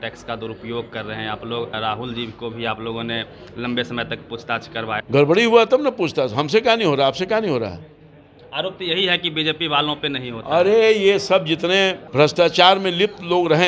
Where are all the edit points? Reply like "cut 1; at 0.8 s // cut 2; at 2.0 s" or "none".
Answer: cut 1; at 1.7 s // cut 2; at 5.0 s // cut 3; at 12.0 s